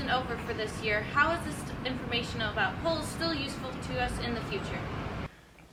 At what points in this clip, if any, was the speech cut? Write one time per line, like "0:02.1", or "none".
none